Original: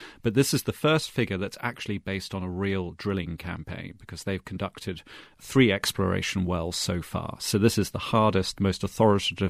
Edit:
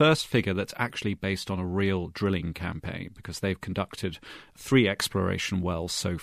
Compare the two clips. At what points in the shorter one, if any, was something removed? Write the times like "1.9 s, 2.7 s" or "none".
none